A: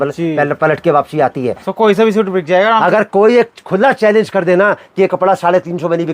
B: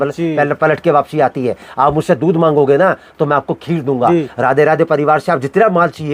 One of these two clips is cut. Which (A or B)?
A